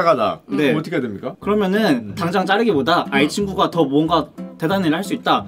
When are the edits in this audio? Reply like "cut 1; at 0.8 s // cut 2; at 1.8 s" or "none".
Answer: none